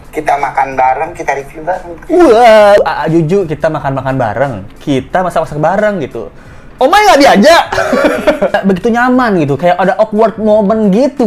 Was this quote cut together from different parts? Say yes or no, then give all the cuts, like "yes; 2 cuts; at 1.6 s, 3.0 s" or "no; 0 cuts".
yes; 2 cuts; at 2.8 s, 8.6 s